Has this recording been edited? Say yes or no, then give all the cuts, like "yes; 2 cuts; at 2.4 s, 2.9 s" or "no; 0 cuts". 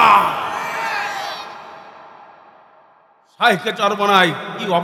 no; 0 cuts